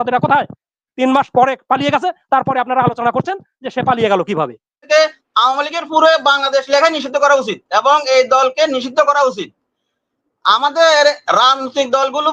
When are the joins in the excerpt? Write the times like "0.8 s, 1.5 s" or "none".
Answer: 4.8 s